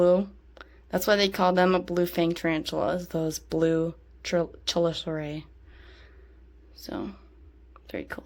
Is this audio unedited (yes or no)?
yes